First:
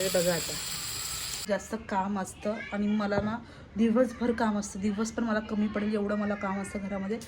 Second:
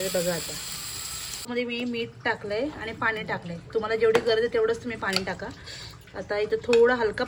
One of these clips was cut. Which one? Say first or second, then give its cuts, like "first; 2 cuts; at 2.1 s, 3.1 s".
first; 1 cut; at 1.4 s